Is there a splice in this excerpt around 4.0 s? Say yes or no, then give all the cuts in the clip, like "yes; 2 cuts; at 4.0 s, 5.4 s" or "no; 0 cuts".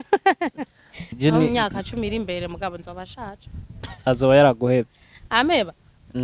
no; 1 cut; at 1.1 s